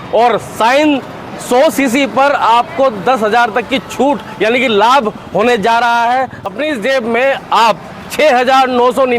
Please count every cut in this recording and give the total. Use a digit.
1